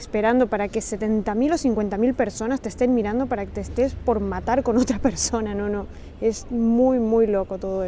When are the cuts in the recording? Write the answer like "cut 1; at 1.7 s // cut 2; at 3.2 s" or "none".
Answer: none